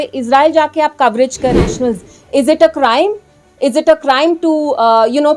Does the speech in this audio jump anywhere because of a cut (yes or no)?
yes